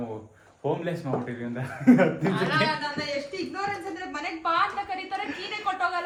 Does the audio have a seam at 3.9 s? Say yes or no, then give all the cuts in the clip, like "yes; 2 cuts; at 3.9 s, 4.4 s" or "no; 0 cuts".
no; 0 cuts